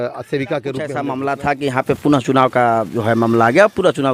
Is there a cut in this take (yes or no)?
yes